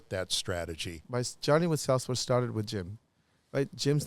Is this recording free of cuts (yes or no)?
no